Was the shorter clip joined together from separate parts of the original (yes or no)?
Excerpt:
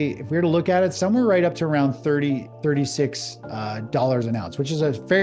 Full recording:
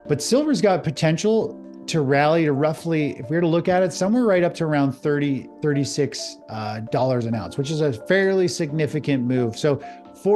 no